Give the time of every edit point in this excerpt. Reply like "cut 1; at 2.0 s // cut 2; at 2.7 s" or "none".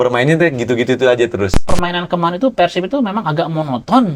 cut 1; at 1.6 s